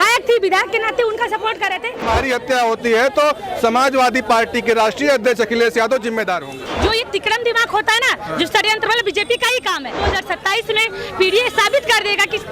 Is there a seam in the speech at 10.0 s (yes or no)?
yes